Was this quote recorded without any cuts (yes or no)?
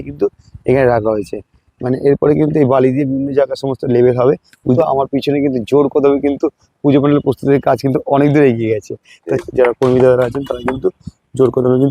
no